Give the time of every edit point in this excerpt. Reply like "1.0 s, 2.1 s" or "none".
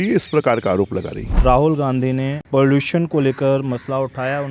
1.2 s, 2.4 s